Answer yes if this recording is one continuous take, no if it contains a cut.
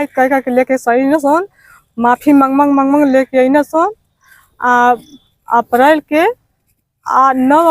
yes